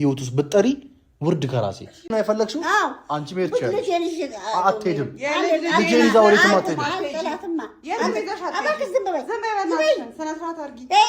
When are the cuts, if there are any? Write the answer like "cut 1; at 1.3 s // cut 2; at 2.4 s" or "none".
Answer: cut 1; at 2.1 s